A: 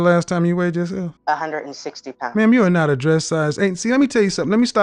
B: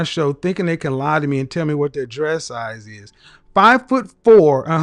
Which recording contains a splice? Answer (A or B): A